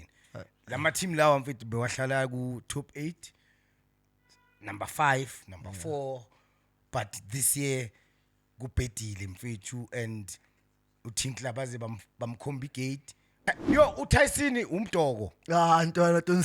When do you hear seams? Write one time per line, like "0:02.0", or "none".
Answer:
0:13.3